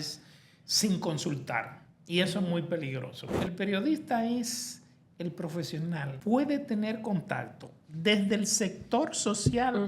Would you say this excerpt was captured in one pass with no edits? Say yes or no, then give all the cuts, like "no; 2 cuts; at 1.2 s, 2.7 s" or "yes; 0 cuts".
no; 2 cuts; at 3.4 s, 6.1 s